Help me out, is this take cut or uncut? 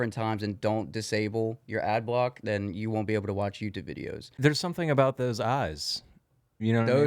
cut